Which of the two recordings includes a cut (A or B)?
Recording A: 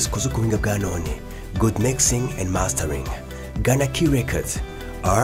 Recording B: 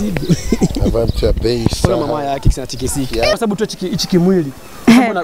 B